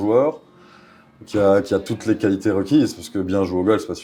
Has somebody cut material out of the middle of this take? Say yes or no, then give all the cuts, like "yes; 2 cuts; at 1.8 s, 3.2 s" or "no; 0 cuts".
no; 0 cuts